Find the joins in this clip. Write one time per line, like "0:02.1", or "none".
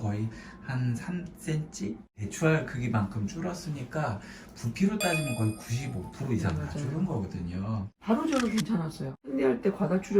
0:02.2
0:07.9
0:09.1